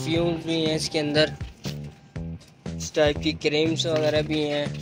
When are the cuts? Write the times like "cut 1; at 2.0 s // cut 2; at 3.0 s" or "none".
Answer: cut 1; at 1.4 s // cut 2; at 2.9 s